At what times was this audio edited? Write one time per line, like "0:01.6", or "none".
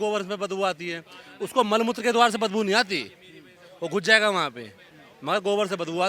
none